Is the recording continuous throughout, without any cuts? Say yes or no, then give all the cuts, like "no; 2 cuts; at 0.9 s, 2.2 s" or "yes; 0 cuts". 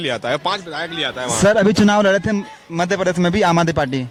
yes; 0 cuts